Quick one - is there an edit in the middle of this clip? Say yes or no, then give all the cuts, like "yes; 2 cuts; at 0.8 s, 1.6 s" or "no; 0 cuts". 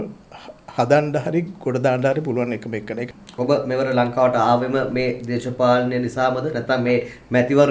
yes; 1 cut; at 3.0 s